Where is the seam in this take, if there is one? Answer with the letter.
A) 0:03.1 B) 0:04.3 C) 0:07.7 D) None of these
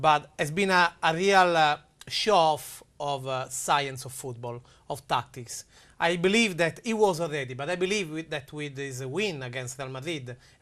C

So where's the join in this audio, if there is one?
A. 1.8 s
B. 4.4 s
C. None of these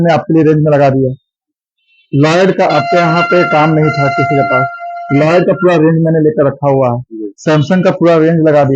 C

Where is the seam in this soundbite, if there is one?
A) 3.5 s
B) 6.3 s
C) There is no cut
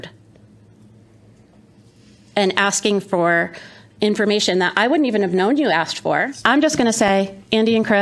B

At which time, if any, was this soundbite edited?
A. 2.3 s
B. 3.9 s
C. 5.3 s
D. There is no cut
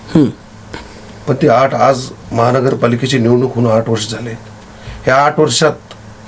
D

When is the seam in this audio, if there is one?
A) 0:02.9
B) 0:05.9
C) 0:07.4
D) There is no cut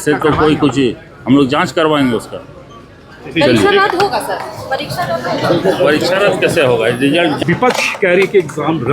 C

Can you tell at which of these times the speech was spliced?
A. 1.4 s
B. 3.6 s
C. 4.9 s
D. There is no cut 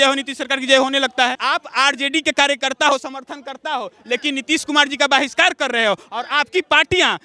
A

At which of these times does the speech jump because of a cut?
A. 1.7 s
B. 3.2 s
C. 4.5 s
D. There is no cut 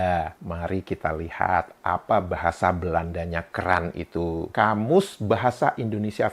C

